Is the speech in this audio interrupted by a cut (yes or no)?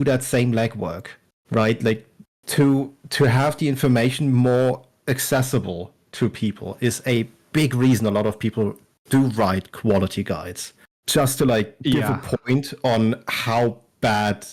no